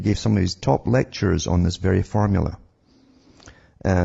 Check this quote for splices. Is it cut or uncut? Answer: cut